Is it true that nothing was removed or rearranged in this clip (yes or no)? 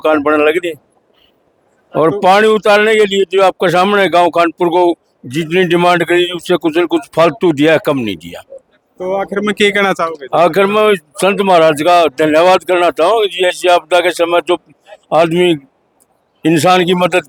yes